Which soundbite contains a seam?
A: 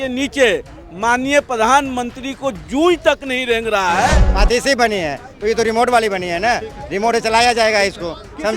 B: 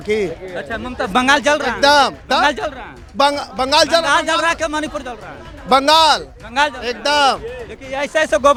A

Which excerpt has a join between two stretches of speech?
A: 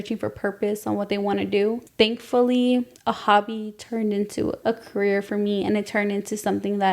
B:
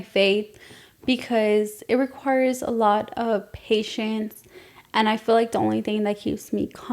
A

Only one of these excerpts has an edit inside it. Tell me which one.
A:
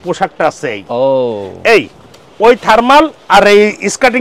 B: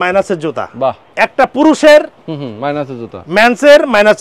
B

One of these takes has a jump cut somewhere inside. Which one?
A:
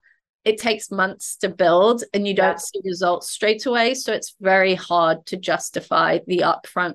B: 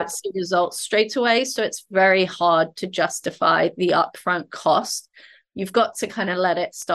B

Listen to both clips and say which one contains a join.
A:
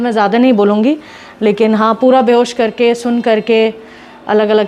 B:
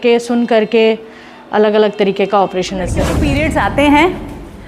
B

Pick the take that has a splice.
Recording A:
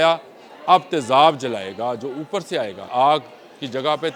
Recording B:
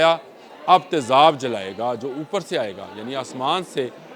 A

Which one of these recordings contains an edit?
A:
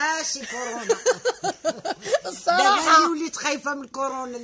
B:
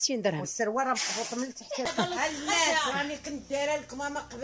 B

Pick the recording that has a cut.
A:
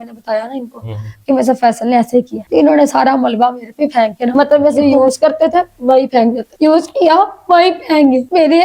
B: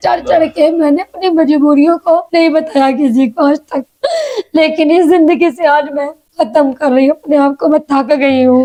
A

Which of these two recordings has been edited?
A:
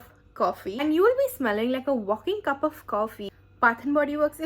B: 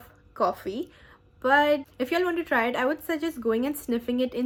A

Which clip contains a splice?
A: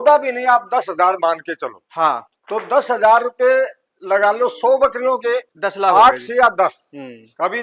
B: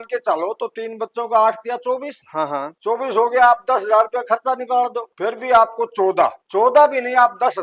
A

